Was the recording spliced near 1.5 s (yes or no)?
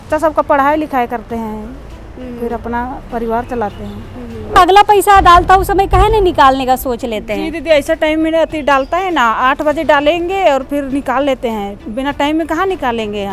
no